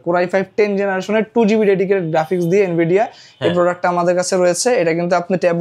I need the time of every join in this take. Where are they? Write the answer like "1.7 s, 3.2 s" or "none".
none